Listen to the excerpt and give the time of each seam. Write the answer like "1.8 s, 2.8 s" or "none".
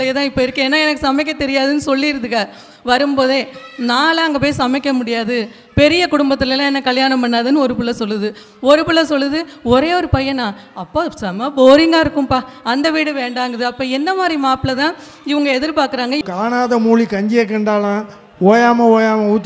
16.2 s